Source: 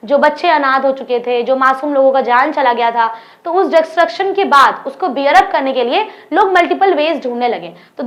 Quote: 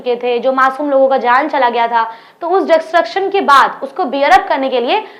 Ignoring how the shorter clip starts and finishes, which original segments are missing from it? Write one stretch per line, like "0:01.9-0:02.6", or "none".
none